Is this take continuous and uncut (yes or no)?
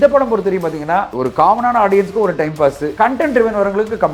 no